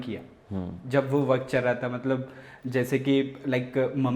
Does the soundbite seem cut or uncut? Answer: uncut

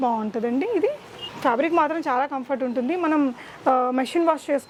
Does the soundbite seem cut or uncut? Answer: uncut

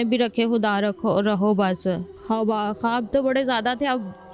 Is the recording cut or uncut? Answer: cut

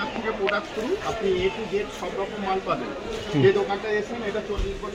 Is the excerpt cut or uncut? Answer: uncut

